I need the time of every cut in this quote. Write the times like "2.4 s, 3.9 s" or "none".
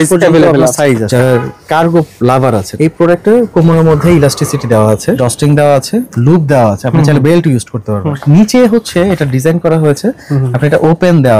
1.1 s, 2.7 s, 5.2 s, 8.1 s